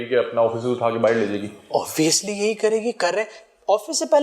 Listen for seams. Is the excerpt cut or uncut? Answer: uncut